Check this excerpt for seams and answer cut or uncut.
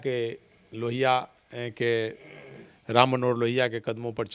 uncut